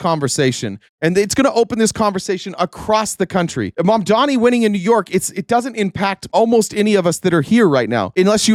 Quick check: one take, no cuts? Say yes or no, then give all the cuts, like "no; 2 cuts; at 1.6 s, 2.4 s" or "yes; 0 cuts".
yes; 0 cuts